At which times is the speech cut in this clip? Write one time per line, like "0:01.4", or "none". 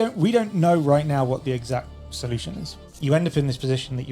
0:02.7